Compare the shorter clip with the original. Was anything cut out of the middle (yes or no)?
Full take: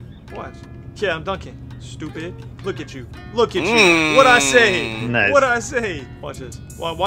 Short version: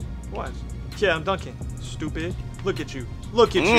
no